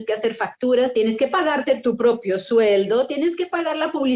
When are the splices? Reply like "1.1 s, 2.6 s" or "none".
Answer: 0.9 s